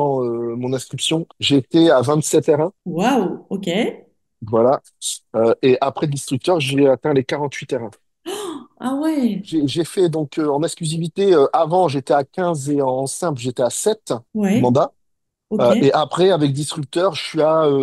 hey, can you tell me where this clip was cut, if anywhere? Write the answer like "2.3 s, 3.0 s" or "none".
1.3 s, 2.8 s, 9.5 s, 14.3 s